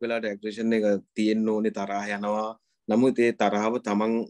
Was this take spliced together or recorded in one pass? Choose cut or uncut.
uncut